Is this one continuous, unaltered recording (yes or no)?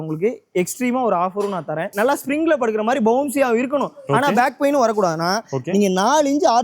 no